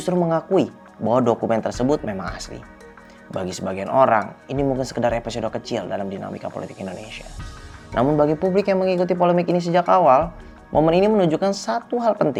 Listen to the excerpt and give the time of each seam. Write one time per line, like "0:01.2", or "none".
none

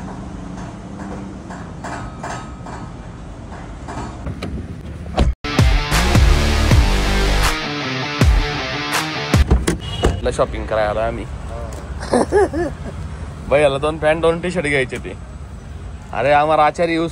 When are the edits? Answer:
none

